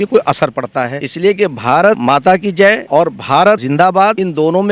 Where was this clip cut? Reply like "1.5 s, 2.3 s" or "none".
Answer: 1.0 s, 2.0 s, 2.8 s, 3.9 s

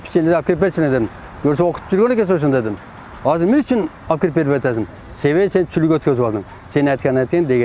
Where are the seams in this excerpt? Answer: none

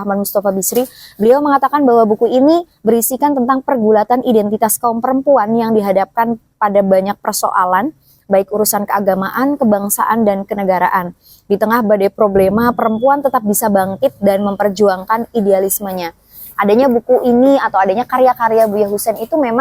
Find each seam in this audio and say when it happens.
none

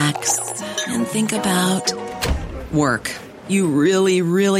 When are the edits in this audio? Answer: none

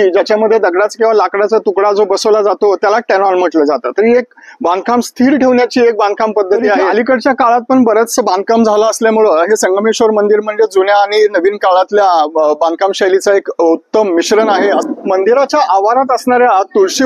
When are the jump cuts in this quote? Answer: 6.9 s, 14.8 s

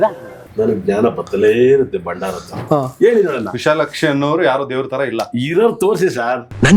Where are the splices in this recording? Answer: 2.6 s

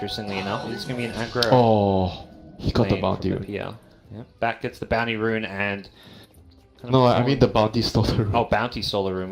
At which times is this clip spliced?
2.9 s

